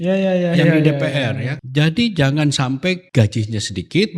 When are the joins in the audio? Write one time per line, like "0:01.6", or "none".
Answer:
0:01.5
0:03.0